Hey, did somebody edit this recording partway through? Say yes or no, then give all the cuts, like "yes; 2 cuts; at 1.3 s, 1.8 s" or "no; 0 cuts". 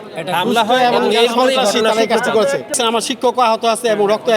yes; 1 cut; at 2.7 s